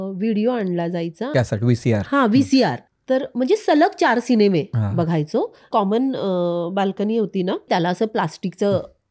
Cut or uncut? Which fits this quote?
cut